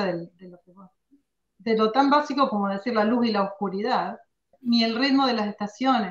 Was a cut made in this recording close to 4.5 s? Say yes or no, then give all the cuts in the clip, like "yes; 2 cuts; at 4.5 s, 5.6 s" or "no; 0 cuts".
yes; 1 cut; at 4.5 s